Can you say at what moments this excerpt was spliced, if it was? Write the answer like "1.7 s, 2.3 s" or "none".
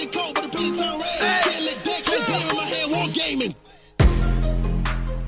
none